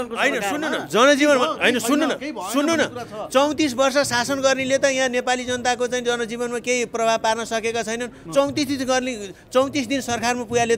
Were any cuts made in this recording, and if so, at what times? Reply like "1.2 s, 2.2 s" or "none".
none